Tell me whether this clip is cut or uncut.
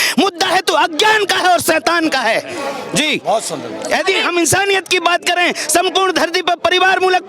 uncut